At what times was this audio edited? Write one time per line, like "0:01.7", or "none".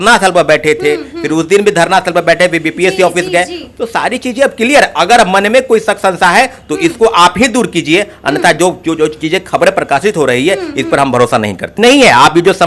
0:11.7

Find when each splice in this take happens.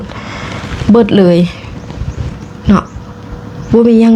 none

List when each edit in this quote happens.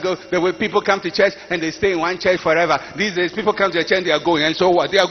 none

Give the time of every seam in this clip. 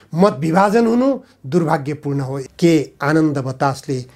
0:02.4

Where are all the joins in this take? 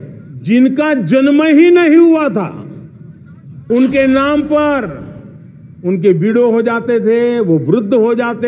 0:03.6

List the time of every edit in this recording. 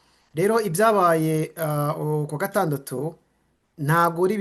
none

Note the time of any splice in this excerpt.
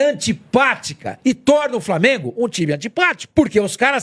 none

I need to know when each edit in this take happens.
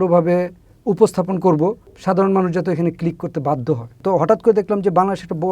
0:01.9
0:03.9

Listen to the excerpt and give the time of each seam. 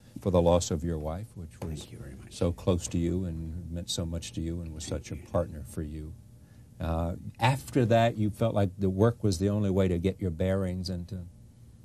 none

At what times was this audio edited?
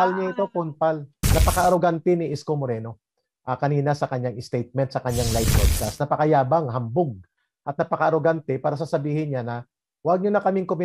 0:01.2

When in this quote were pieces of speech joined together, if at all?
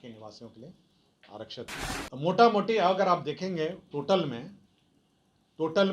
0:01.9

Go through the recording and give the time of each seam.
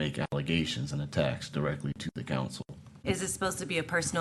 0:02.8

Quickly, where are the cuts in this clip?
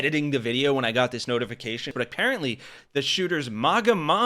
0:01.9

